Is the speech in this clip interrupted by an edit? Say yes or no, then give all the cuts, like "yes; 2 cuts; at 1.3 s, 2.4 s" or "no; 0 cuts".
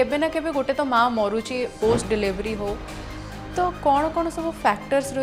no; 0 cuts